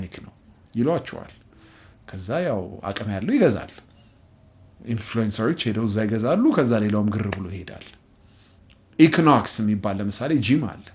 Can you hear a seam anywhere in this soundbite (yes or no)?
no